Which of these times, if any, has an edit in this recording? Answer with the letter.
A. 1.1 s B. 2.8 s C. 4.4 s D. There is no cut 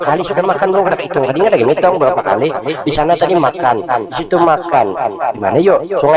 D